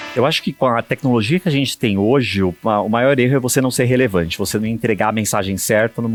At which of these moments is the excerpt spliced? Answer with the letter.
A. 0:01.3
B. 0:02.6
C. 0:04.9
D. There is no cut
D